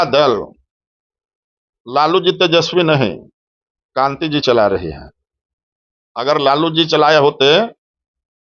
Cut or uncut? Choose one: uncut